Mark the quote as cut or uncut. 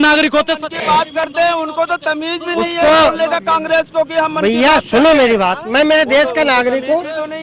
uncut